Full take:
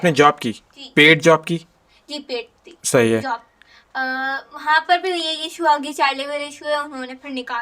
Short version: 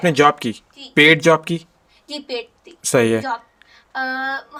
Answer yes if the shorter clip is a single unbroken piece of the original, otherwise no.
yes